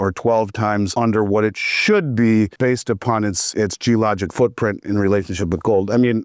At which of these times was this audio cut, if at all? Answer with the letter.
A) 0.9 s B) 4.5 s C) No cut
A